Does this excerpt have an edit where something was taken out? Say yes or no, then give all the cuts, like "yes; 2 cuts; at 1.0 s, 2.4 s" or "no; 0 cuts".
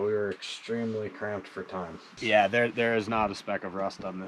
yes; 1 cut; at 2.2 s